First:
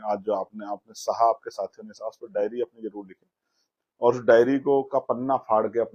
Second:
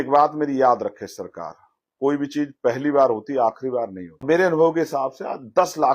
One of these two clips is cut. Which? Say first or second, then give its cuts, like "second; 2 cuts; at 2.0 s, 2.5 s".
second; 1 cut; at 4.2 s